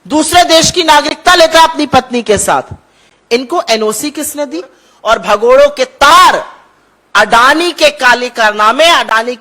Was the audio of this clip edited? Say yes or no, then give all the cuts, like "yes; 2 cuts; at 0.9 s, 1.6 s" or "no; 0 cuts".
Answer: yes; 1 cut; at 4.8 s